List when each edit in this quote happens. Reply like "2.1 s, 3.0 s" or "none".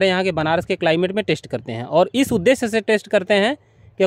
none

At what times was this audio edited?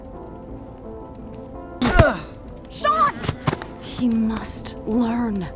1.8 s

